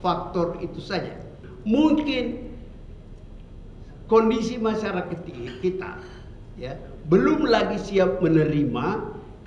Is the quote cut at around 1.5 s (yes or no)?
yes